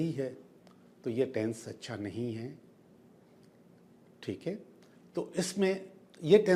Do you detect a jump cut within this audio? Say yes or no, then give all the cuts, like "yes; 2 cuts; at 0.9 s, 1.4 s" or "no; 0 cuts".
no; 0 cuts